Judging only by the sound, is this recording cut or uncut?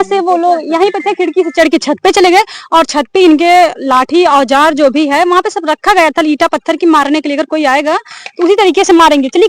uncut